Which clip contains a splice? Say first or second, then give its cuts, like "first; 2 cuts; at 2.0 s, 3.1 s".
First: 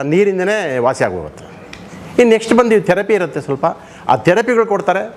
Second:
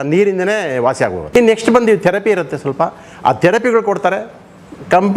second; 1 cut; at 1.2 s